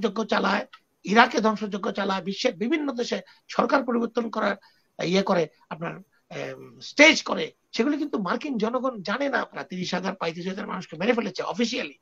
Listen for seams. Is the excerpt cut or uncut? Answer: cut